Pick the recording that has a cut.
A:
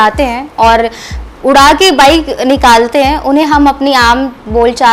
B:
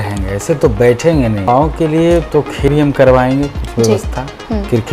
B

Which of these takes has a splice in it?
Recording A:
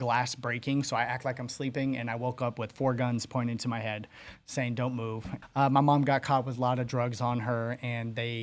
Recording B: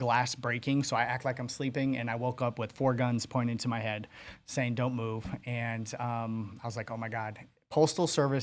A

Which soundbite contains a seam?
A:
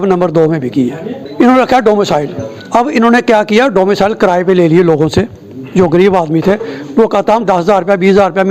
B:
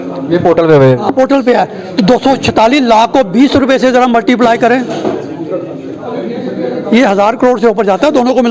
A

